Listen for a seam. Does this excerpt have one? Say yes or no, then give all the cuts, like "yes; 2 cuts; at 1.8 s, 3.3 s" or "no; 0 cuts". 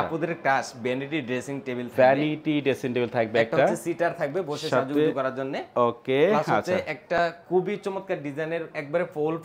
no; 0 cuts